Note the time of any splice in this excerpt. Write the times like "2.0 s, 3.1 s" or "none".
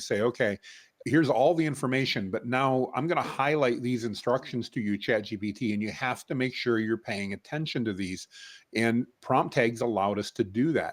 none

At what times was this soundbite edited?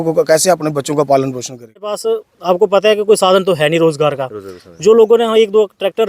2.0 s

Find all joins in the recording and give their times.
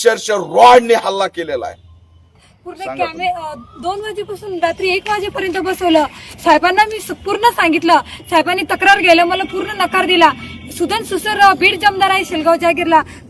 2.4 s

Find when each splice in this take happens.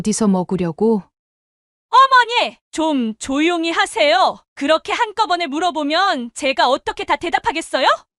1.2 s

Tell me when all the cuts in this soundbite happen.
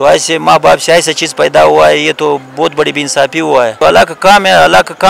3.8 s

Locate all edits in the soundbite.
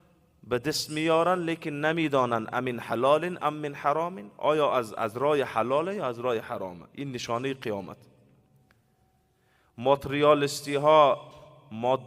none

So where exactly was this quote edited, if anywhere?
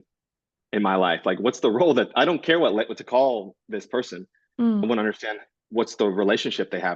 4.8 s

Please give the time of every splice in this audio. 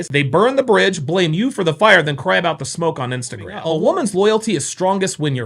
3.6 s

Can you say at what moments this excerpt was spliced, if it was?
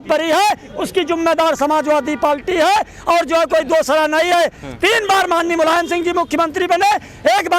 none

